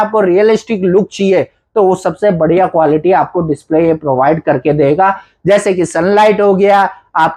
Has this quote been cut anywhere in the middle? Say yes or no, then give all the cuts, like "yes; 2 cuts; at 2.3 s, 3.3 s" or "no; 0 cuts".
no; 0 cuts